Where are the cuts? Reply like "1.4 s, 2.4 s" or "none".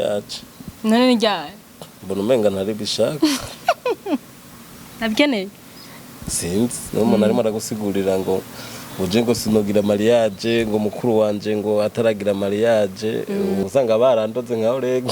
13.6 s